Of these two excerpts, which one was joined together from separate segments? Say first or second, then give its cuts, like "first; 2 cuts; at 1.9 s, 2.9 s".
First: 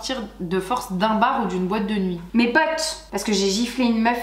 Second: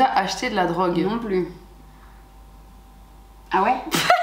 first; 1 cut; at 3.1 s